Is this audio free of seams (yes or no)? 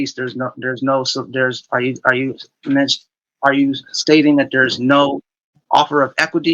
yes